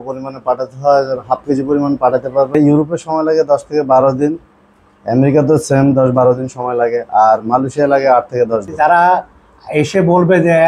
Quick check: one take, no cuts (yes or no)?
no